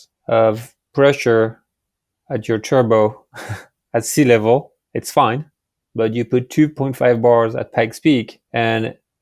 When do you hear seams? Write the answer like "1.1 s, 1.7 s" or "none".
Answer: none